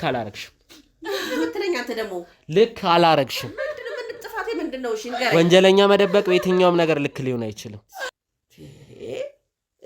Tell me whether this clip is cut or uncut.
cut